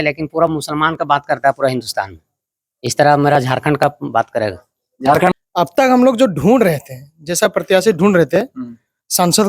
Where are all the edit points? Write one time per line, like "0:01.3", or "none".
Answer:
0:05.3